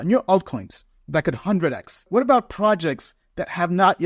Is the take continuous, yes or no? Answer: no